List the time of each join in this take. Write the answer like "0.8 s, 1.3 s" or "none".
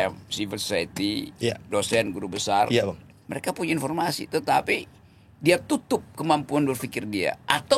none